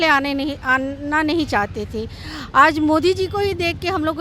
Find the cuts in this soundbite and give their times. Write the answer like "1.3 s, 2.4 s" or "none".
none